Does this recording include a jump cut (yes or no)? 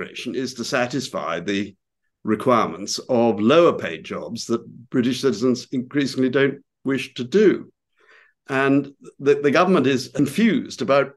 yes